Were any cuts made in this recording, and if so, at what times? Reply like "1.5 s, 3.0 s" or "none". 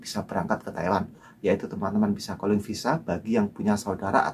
1.2 s